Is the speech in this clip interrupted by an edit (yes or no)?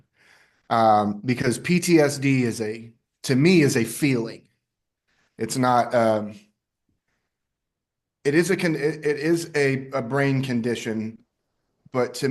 no